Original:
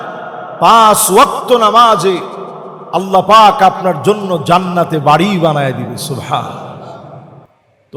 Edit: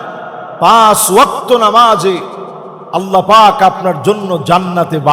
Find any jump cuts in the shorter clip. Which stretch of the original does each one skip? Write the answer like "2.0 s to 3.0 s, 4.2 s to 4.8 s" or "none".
none